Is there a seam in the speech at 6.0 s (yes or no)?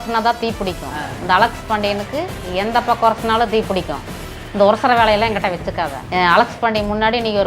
yes